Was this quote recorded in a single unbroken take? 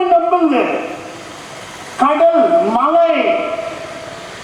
yes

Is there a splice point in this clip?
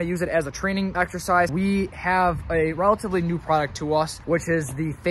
yes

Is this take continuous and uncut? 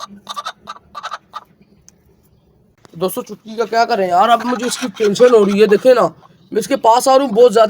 no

